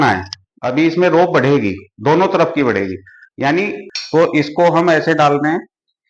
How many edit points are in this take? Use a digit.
1